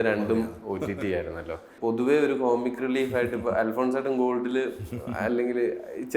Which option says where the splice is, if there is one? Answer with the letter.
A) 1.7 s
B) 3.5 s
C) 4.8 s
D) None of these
A